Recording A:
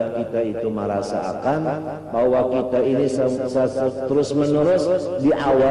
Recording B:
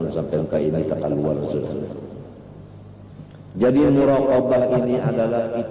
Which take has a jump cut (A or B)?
B